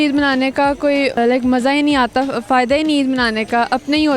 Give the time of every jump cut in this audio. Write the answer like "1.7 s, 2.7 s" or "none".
1.2 s